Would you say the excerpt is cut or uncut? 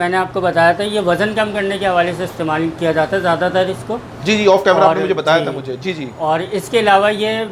uncut